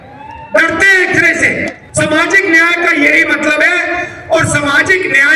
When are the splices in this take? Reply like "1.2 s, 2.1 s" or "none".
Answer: 1.8 s